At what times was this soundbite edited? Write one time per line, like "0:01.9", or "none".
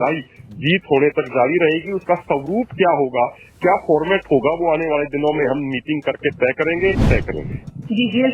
0:07.0